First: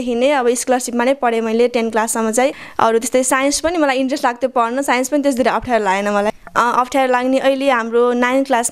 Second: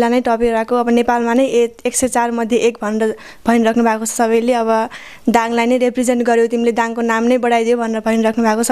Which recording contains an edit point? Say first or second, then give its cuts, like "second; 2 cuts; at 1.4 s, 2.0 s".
first; 2 cuts; at 2.6 s, 6.3 s